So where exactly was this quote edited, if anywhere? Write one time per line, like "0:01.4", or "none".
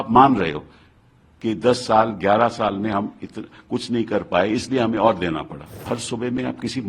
0:05.8